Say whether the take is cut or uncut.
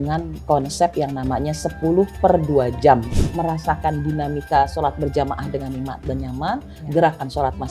cut